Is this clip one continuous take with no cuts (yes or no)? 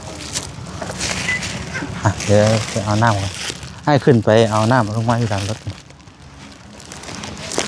yes